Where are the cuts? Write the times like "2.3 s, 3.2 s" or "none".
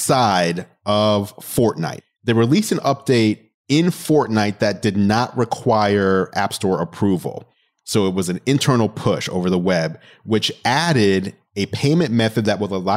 1.9 s, 3.5 s